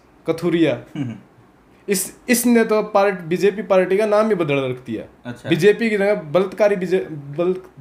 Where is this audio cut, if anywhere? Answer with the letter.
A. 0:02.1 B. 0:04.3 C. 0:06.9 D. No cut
D